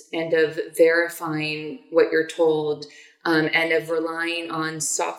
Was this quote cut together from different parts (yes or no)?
no